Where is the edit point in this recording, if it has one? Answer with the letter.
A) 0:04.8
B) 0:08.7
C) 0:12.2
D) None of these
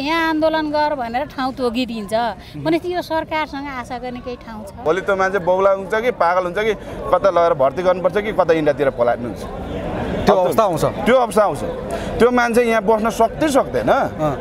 A